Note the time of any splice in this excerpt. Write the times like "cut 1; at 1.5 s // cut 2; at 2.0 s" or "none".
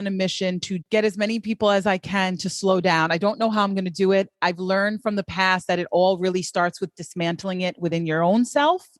cut 1; at 0.8 s // cut 2; at 4.4 s